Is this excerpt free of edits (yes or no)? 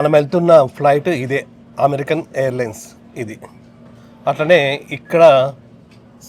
yes